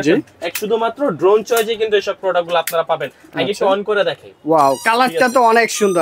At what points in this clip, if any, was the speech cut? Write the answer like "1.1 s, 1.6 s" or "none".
none

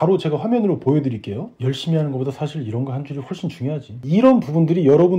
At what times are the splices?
3.9 s

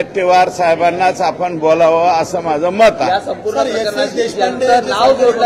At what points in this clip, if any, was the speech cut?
none

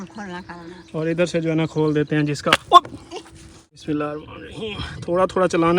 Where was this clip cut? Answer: 3.8 s

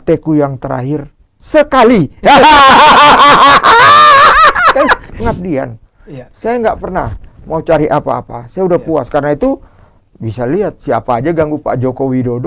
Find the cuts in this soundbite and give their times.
5.2 s

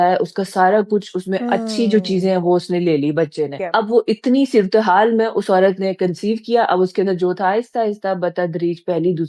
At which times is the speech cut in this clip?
3.6 s

